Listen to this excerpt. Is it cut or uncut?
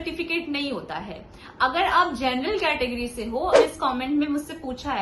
cut